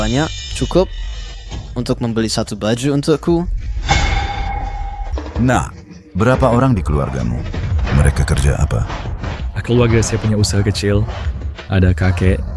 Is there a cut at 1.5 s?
no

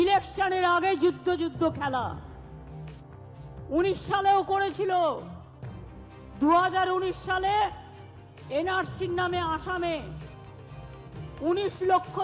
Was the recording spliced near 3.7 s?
yes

